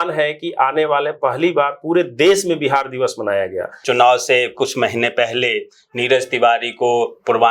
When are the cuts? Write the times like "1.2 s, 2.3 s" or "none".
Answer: 3.8 s